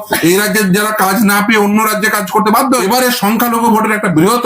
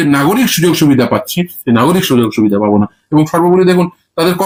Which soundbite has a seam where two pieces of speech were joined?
first; 1 cut; at 2.8 s

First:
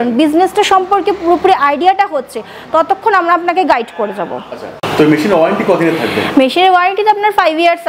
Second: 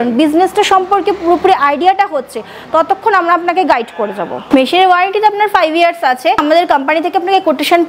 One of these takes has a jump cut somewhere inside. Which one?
second; 2 cuts; at 4.4 s, 6.4 s

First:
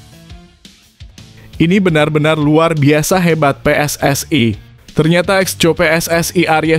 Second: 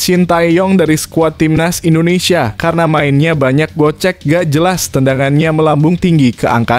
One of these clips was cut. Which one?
first; 1 cut; at 1.6 s

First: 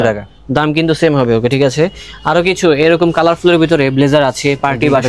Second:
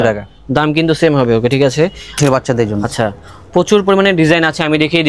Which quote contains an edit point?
second; 1 cut; at 2.2 s

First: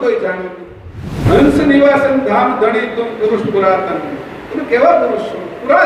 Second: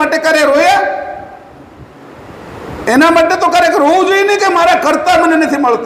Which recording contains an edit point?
first; 1 cut; at 1.0 s

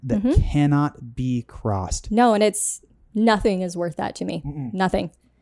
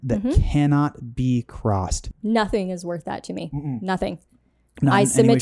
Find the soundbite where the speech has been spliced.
second; 1 cut; at 1.9 s

